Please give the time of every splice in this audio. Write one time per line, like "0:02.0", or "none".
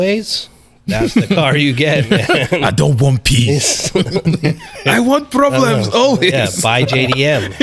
none